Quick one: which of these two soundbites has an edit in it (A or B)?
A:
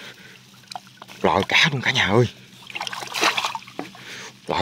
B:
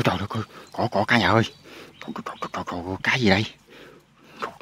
A